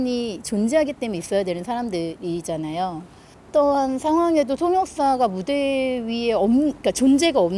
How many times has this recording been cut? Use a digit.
0